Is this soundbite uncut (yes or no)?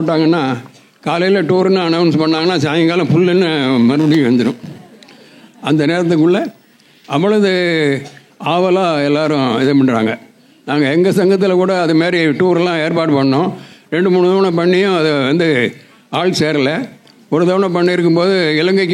yes